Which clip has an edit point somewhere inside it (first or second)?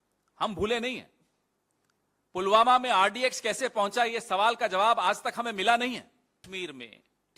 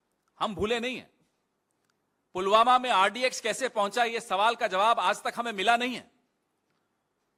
first